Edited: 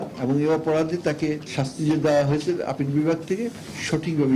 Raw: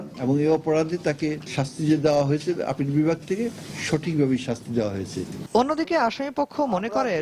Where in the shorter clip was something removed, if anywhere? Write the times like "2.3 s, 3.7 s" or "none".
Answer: none